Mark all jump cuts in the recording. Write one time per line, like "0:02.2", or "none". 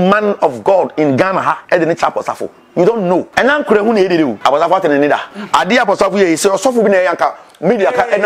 0:01.6
0:03.3
0:04.4
0:05.3